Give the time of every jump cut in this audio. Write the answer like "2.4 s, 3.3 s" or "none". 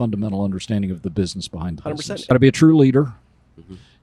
2.3 s

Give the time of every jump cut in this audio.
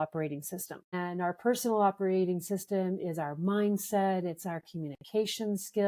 0.9 s

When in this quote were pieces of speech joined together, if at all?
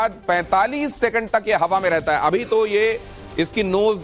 1.3 s

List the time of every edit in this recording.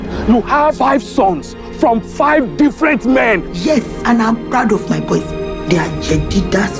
none

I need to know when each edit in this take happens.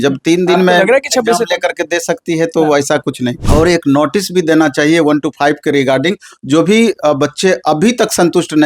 3.4 s

